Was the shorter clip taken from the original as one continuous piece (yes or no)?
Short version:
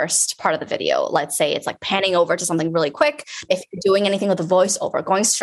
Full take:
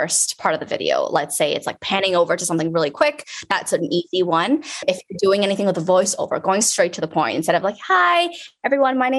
no